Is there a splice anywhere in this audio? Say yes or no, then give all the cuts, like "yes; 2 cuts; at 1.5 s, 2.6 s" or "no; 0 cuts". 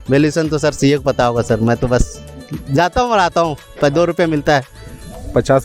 no; 0 cuts